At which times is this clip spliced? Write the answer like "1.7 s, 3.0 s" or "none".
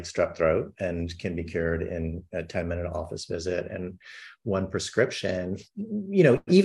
none